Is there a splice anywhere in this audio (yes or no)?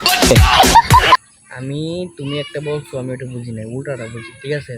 yes